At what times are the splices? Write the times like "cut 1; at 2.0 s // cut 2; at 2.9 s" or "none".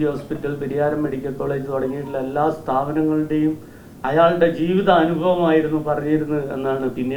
none